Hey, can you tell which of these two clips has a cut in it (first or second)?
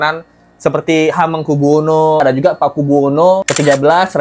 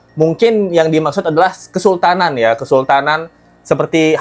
first